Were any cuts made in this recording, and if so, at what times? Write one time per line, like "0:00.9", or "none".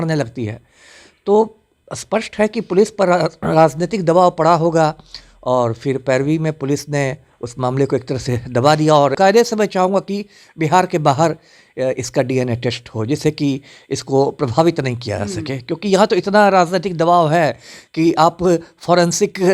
0:09.2